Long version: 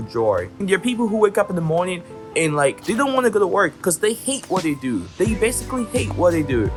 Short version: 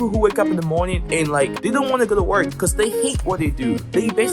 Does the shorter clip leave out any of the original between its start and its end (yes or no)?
yes